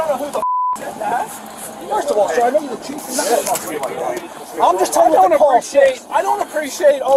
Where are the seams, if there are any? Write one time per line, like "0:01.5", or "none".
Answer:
none